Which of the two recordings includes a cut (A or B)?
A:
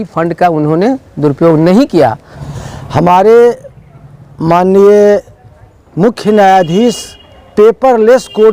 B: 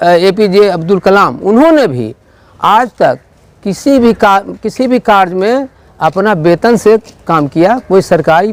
A